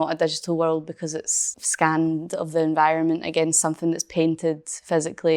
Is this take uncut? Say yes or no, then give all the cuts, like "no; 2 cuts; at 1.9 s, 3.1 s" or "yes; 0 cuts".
no; 1 cut; at 1.6 s